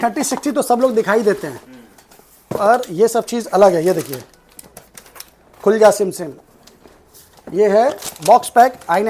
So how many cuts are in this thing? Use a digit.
0